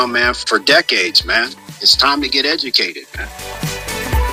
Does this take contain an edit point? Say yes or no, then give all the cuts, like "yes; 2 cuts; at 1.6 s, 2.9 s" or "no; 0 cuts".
no; 0 cuts